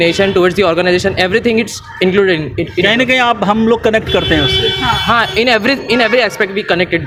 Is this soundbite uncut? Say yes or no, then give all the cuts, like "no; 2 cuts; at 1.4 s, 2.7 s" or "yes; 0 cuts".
yes; 0 cuts